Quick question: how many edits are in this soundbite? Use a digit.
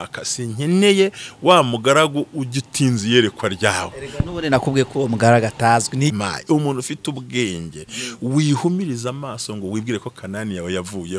1